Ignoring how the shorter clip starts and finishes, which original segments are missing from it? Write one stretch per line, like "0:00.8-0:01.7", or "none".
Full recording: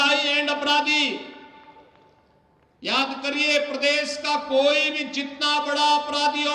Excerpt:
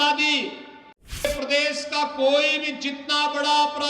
0:01.9-0:03.6